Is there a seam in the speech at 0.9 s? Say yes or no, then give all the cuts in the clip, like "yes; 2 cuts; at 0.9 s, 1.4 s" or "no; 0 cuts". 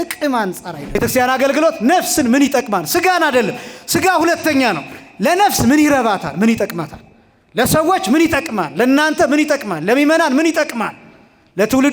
yes; 1 cut; at 0.9 s